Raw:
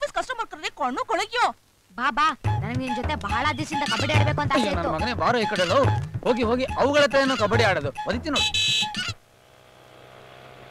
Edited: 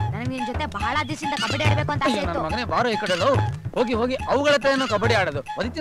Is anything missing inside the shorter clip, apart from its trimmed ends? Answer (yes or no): no